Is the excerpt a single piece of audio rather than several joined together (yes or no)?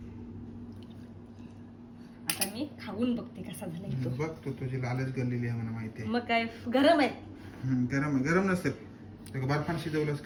yes